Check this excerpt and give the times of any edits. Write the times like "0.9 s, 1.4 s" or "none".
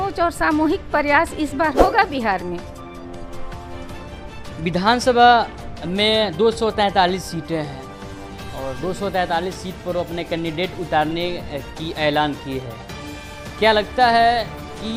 none